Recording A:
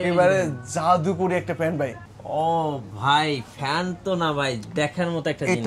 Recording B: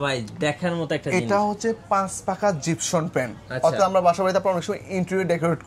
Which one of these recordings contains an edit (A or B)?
A